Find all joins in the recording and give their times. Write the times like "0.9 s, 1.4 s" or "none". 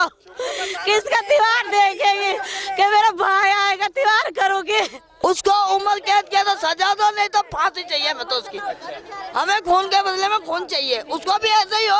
5.1 s